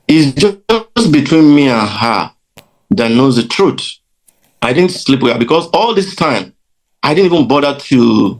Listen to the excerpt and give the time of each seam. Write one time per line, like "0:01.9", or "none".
none